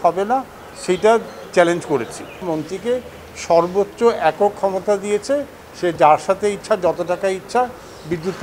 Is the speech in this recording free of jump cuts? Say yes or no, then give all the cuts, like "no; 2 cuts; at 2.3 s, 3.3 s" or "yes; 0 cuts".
no; 1 cut; at 2.4 s